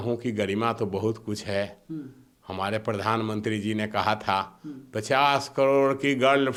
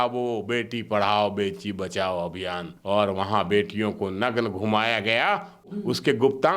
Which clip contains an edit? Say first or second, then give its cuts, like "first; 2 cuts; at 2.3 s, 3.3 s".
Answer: second; 2 cuts; at 2.7 s, 5.7 s